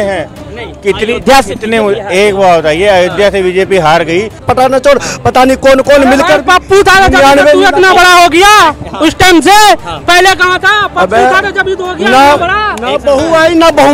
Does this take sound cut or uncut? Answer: cut